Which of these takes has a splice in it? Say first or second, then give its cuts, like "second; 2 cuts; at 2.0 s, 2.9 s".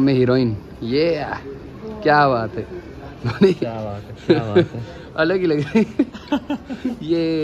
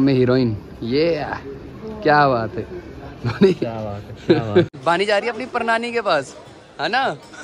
second; 1 cut; at 4.8 s